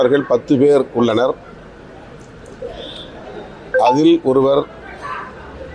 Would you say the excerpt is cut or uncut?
uncut